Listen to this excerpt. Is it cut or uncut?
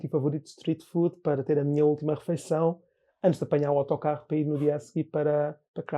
uncut